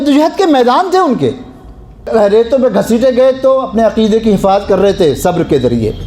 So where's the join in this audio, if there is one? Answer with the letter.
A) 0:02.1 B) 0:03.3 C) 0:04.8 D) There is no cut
A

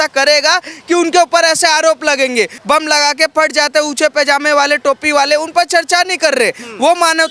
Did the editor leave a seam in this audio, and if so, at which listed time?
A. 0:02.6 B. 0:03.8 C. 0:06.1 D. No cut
A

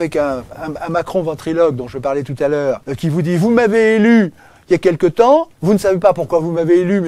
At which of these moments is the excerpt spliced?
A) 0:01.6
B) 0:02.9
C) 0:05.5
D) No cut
B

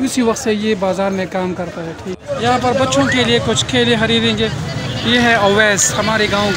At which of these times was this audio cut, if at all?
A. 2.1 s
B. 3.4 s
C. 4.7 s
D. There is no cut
A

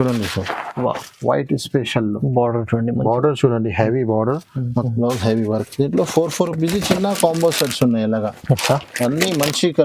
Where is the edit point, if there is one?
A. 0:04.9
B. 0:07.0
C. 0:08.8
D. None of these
A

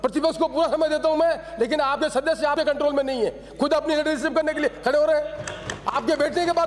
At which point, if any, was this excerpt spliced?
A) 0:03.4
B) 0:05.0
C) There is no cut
C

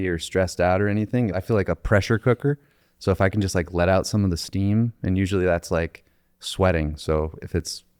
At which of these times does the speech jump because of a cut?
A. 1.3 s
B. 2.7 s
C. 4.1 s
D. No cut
A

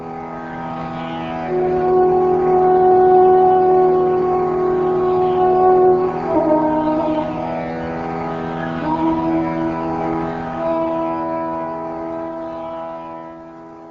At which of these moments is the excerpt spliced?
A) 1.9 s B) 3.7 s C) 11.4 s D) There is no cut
C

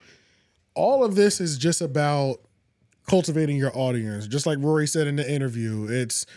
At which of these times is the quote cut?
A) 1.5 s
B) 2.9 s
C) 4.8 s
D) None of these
D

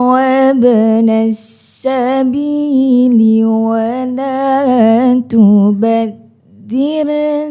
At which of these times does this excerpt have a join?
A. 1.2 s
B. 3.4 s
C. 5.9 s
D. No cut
D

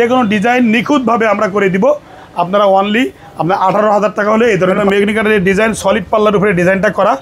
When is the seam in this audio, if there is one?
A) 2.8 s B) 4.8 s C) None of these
B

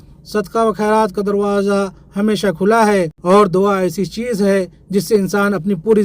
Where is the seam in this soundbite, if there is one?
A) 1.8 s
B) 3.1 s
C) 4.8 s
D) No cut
B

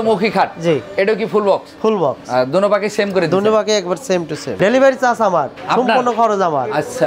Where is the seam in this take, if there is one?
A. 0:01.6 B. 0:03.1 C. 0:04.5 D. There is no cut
C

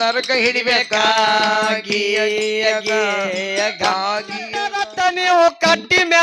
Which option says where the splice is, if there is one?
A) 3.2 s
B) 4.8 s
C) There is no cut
B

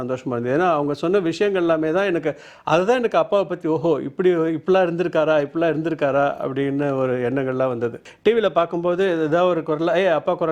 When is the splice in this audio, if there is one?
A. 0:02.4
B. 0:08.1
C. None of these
B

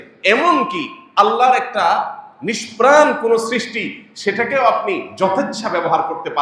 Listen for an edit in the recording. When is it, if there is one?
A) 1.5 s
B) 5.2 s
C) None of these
C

